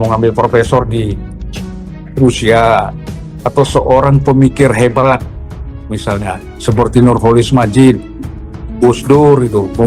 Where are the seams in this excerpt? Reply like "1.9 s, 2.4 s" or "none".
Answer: none